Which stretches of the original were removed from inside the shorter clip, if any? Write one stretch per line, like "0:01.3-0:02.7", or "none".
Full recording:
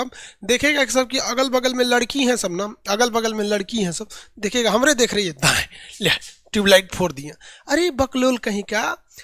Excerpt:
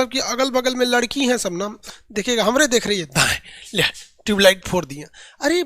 0:02.8-0:04.1

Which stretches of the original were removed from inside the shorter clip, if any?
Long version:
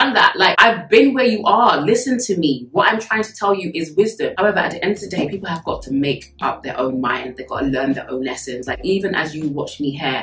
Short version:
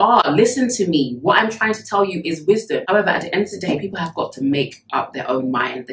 none

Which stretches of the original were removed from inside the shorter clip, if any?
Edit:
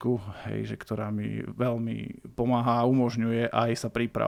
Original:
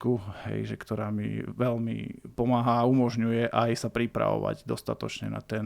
none

